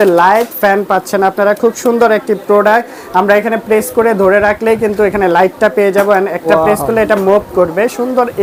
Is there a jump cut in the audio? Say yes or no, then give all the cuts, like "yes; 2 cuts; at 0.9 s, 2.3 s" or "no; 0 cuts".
no; 0 cuts